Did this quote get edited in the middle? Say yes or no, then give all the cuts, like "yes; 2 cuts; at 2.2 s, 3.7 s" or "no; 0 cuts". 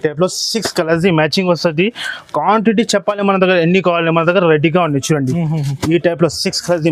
no; 0 cuts